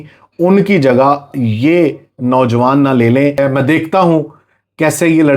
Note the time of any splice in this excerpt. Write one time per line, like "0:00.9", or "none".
0:03.4